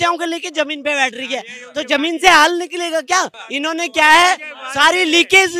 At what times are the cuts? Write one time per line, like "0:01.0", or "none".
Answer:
none